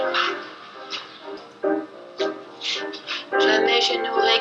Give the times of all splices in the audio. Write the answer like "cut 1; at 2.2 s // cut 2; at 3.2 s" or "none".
cut 1; at 1.5 s

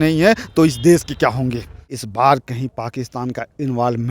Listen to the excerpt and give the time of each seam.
cut 1; at 2.0 s

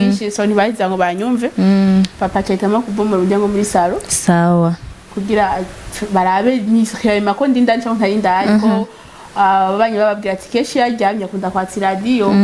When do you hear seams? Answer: none

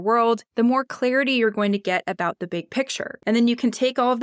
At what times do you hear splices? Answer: cut 1; at 3.2 s

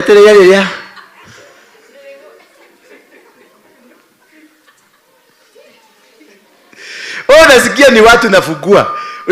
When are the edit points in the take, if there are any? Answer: none

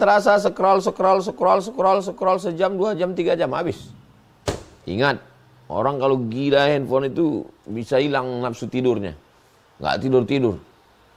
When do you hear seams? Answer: none

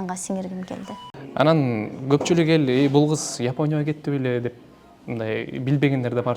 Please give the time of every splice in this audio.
cut 1; at 1.0 s

